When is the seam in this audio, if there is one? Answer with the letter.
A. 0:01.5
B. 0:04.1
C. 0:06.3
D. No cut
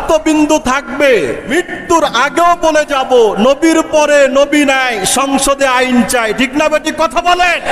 A